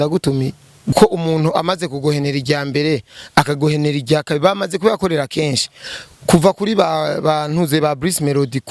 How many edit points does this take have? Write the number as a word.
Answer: one